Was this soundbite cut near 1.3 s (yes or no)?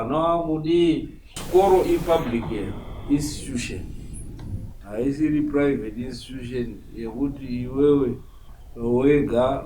yes